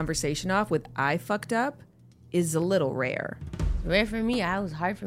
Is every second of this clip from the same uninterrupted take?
no; 1 cut; at 3.8 s

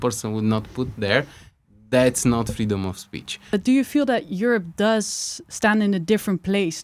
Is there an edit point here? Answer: yes; 1 cut; at 3.4 s

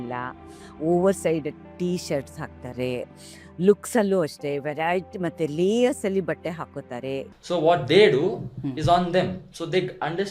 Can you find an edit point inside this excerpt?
yes; 1 cut; at 7.3 s

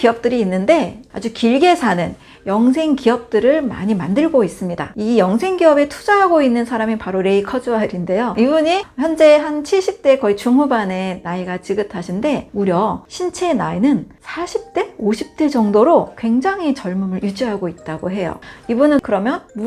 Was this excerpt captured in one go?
no; 3 cuts; at 1.0 s, 8.3 s, 18.4 s

